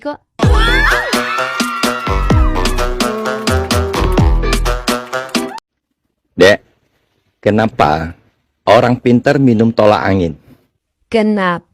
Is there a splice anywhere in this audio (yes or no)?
yes